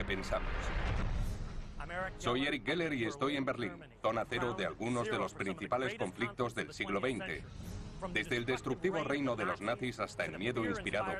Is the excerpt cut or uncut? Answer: uncut